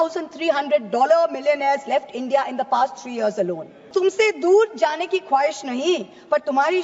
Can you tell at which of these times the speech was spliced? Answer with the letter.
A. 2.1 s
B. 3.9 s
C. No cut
B